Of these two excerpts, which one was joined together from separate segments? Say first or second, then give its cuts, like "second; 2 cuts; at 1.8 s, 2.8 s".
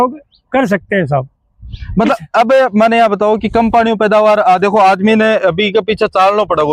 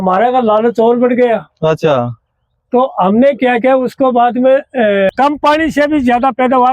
second; 1 cut; at 5.1 s